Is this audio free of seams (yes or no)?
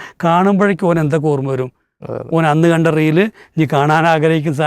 yes